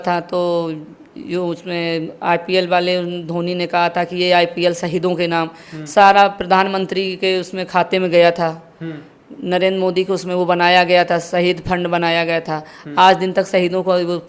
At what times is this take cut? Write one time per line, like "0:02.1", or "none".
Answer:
none